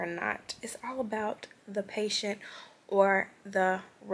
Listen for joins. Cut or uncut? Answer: uncut